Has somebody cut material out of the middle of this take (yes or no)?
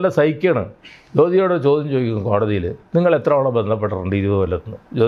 no